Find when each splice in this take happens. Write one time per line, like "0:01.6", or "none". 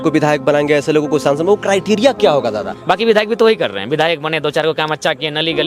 0:02.7